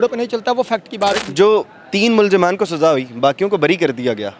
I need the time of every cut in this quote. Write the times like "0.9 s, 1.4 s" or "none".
1.2 s